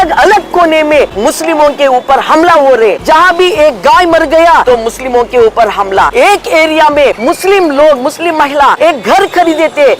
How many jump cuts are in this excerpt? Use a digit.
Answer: 6